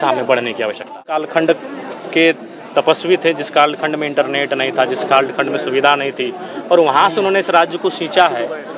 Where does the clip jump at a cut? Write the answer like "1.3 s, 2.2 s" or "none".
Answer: 1.2 s